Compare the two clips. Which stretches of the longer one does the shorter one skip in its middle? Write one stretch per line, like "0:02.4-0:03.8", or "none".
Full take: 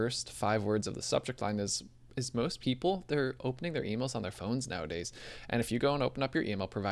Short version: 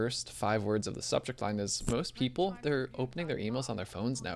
0:01.8-0:02.2